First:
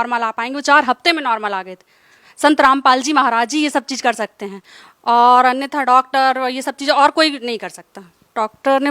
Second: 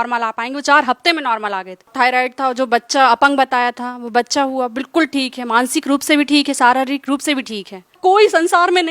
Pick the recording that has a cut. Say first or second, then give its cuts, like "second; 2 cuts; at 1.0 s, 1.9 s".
second; 2 cuts; at 1.9 s, 8.0 s